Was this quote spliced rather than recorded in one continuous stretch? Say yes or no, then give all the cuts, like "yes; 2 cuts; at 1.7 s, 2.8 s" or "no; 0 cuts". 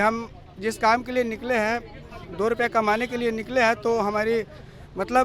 no; 0 cuts